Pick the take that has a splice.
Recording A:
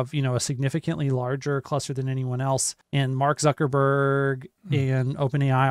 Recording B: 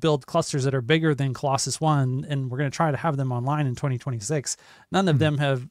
A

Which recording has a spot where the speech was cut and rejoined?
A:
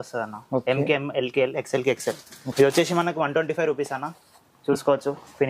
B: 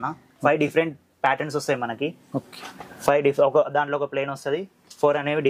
A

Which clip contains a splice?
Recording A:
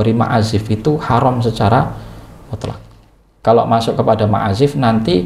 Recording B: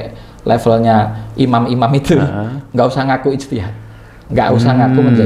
A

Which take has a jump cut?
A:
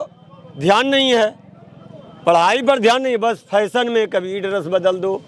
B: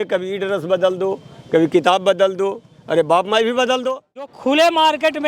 B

